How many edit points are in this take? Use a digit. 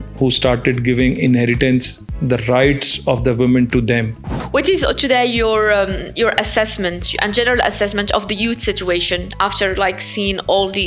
1